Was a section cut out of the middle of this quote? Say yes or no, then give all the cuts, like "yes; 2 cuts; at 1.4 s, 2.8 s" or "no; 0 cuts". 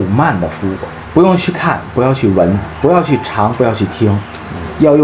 yes; 1 cut; at 0.9 s